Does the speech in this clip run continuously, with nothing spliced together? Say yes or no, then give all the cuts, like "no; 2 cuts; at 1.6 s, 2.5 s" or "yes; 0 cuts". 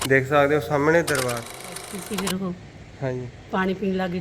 no; 1 cut; at 1.6 s